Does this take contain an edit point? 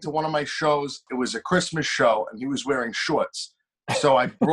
yes; 1 cut; at 1.0 s

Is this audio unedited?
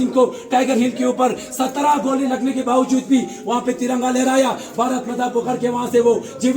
yes; 0 cuts

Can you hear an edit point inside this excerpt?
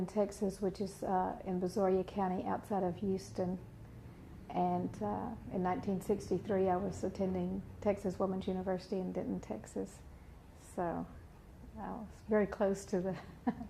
yes; 1 cut; at 11.1 s

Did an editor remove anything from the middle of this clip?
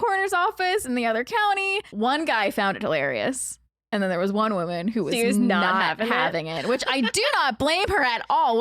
yes; 1 cut; at 1.9 s

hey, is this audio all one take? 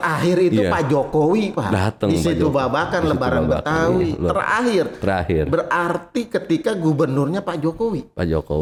yes; 0 cuts

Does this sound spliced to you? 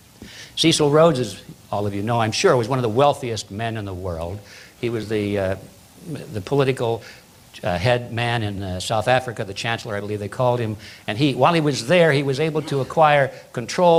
no; 0 cuts

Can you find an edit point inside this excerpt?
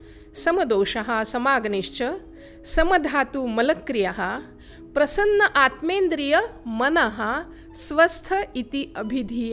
no; 0 cuts

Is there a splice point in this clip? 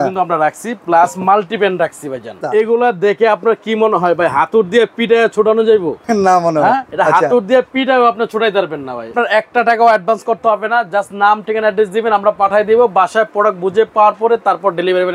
yes; 4 cuts; at 2.4 s, 5.9 s, 6.9 s, 9.1 s

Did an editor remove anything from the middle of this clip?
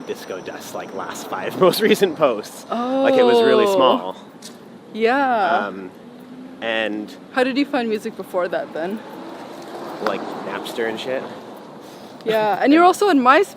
no; 0 cuts

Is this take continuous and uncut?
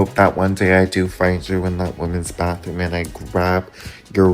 yes; 0 cuts

